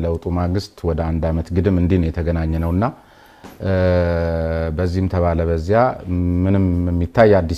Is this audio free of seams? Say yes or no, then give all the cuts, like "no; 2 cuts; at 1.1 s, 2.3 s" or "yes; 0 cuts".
yes; 0 cuts